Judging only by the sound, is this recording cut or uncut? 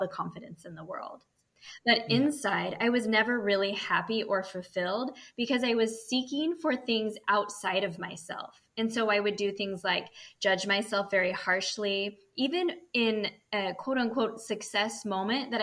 uncut